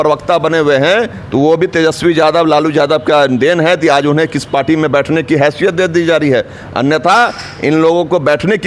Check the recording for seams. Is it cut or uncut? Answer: uncut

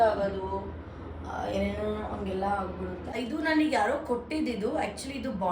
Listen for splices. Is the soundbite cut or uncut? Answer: cut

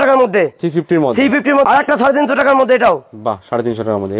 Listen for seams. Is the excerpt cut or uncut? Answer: cut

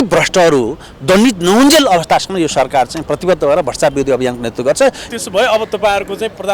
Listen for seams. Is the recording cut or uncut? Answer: cut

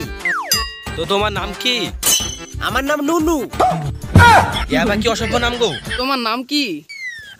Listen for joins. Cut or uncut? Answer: cut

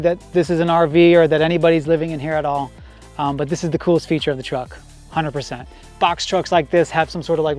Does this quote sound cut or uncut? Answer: uncut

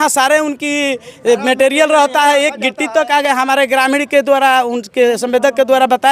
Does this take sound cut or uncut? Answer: uncut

